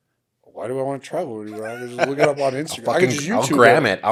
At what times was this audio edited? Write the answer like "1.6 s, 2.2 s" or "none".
none